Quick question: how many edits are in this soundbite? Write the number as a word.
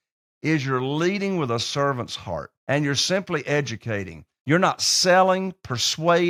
zero